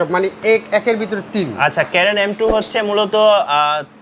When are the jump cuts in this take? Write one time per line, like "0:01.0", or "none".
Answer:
none